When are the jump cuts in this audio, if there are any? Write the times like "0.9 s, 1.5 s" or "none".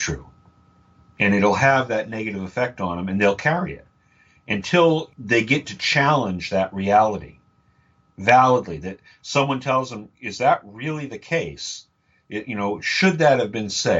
5.1 s